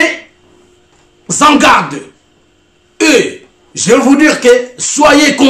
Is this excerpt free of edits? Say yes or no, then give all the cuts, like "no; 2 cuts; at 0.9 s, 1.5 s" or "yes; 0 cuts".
yes; 0 cuts